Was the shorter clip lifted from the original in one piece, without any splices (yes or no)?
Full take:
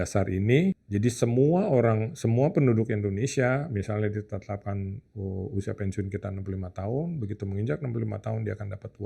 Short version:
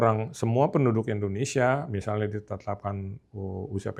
yes